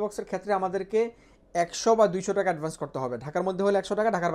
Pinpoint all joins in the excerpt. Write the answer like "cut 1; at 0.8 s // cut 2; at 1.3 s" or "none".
none